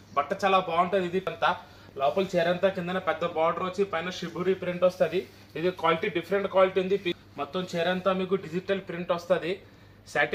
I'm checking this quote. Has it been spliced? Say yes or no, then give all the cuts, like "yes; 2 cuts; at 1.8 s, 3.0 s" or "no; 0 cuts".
yes; 2 cuts; at 1.3 s, 7.2 s